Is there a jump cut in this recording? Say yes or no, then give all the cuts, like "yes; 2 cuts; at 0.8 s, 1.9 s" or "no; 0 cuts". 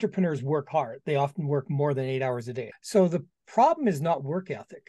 yes; 1 cut; at 2.7 s